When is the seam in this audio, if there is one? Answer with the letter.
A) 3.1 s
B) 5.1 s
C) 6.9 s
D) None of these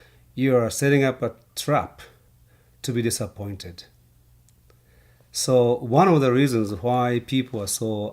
A